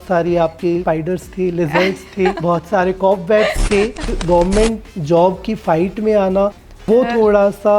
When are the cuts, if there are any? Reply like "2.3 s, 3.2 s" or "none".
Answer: 0.8 s, 2.4 s, 4.2 s

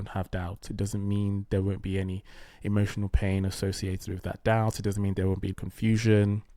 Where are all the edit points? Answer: 5.5 s

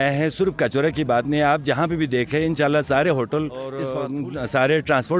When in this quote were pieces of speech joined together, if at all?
3.8 s

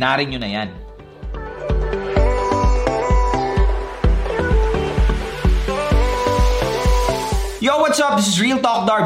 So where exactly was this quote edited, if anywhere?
7.6 s

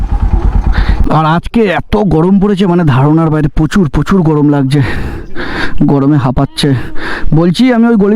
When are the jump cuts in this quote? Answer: 1.0 s

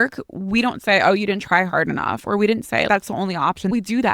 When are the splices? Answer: 2.9 s

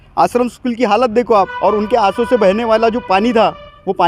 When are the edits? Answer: 1.5 s

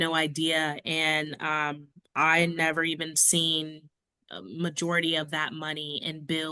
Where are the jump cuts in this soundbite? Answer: none

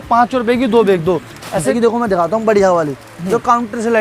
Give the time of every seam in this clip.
1.7 s

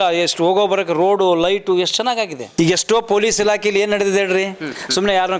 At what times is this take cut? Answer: 2.5 s

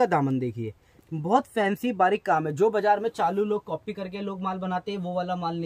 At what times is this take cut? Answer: none

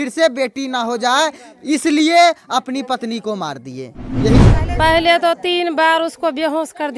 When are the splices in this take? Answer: 4.4 s

